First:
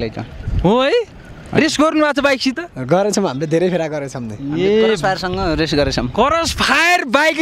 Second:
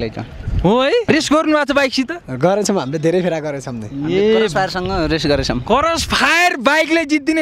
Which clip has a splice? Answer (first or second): second